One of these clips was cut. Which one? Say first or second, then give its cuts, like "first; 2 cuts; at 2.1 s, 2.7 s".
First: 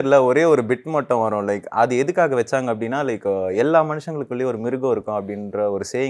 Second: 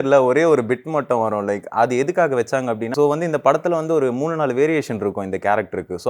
second; 1 cut; at 2.9 s